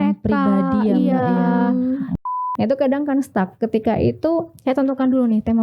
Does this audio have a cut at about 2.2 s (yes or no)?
yes